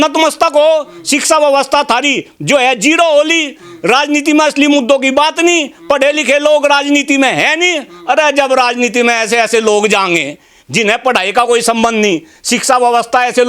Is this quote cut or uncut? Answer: uncut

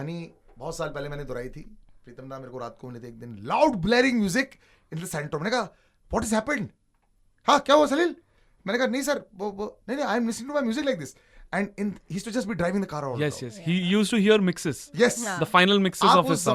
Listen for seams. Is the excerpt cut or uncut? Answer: uncut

